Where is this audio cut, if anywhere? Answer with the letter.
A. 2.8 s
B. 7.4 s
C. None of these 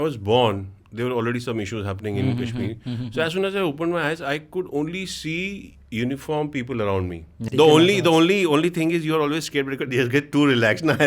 B